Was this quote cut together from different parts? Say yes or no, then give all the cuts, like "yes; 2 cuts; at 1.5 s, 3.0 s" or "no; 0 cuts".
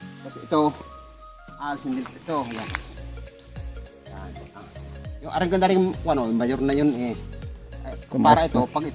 no; 0 cuts